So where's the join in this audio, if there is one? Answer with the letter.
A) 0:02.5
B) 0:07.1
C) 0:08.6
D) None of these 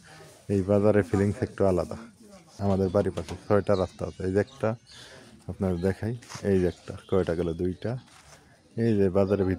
A